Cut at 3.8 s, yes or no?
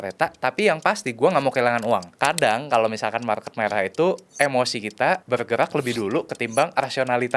no